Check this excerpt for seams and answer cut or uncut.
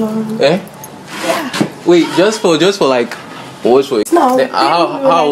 uncut